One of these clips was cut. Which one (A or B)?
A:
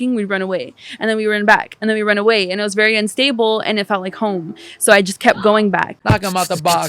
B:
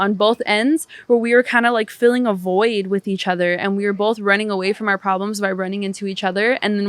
A